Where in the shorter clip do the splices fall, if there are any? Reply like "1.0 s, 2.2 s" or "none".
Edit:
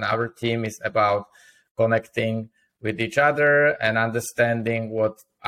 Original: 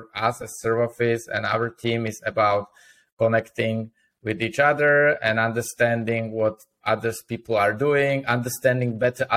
none